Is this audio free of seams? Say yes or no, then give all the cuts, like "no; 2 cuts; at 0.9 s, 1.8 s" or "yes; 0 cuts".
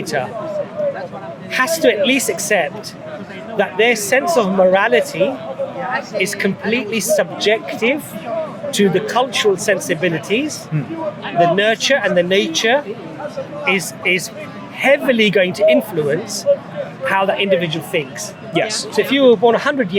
yes; 0 cuts